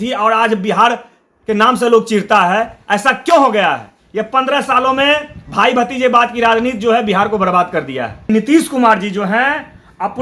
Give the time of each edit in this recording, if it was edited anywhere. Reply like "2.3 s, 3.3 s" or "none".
8.3 s